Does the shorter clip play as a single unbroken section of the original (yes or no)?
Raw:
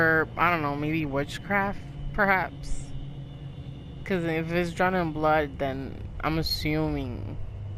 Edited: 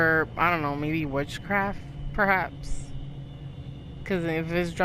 yes